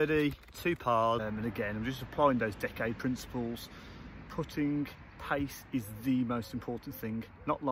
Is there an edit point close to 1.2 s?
yes; 1 cut; at 1.2 s

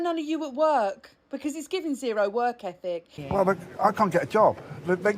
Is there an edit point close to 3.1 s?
yes; 1 cut; at 3.1 s

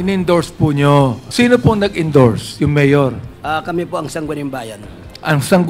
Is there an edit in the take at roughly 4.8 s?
no; 2 cuts; at 1.2 s, 3.3 s

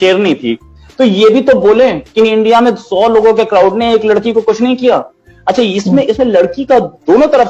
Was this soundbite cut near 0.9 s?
no; 0 cuts

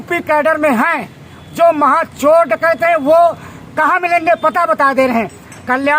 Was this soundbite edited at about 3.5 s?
no; 0 cuts

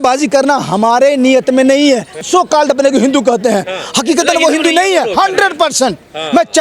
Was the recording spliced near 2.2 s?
yes; 1 cut; at 2.2 s

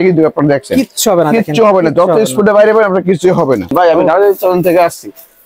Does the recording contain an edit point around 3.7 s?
yes; 1 cut; at 3.7 s

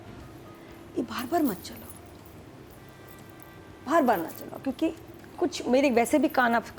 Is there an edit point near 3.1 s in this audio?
no; 0 cuts

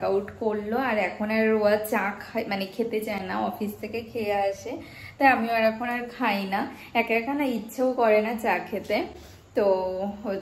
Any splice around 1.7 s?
no; 0 cuts

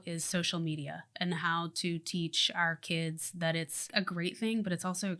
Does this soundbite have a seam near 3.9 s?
yes; 1 cut; at 3.9 s

